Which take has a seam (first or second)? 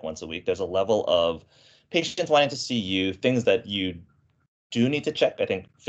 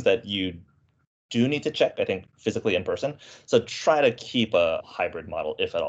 second